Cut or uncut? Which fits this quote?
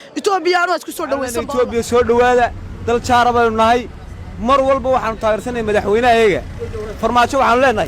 cut